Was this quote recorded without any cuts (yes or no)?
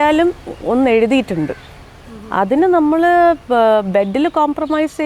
yes